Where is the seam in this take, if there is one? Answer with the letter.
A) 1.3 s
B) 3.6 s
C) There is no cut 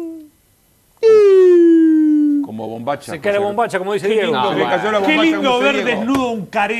B